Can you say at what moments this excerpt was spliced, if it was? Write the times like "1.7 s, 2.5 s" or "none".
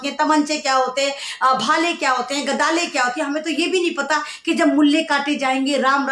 none